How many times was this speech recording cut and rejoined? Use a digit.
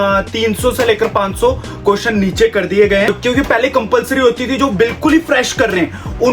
1